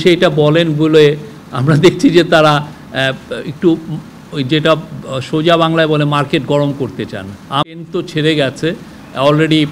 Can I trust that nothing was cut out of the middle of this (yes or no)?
no